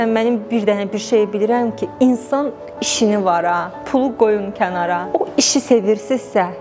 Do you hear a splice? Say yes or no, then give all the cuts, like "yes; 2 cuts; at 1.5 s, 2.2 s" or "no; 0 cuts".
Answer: yes; 1 cut; at 5.1 s